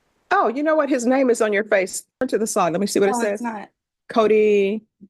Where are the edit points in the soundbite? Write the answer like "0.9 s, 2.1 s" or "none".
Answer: none